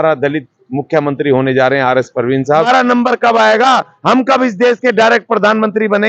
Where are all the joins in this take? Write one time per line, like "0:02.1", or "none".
0:02.5